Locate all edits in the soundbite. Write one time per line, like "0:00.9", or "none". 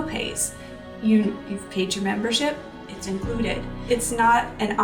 0:03.8

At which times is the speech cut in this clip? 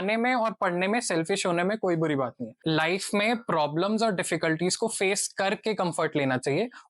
0:02.6

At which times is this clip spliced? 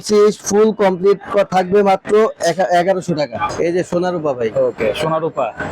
0:03.5

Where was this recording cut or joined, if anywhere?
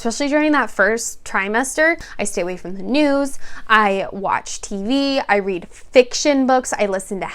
0:02.1

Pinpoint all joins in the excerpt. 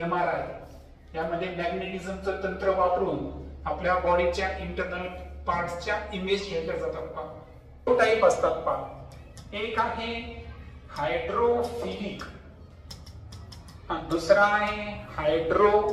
0:07.9

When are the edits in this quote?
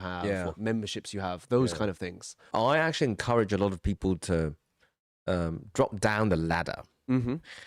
0:02.5

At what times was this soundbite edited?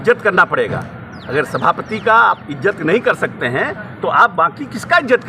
none

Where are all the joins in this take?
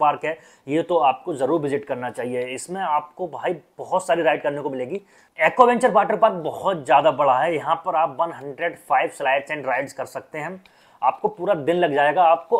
none

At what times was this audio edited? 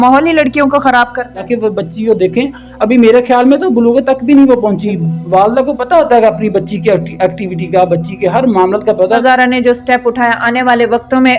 0:01.5
0:05.0
0:09.2

